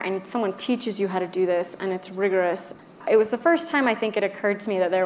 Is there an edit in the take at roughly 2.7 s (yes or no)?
yes